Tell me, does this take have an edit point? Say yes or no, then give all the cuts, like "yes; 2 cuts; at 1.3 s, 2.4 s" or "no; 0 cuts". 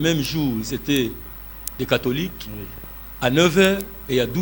no; 0 cuts